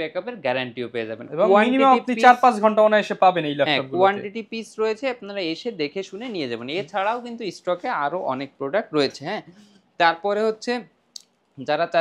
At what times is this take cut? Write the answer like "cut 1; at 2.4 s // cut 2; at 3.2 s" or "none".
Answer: none